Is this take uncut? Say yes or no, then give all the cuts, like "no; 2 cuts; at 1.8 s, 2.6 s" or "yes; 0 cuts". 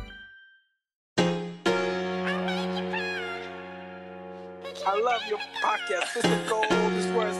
no; 1 cut; at 1.0 s